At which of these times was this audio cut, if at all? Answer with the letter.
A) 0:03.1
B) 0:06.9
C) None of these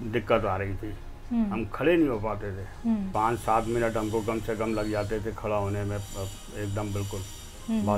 A